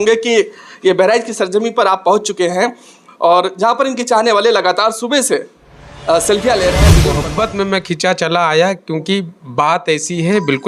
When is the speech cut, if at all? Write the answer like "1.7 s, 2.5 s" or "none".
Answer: 6.9 s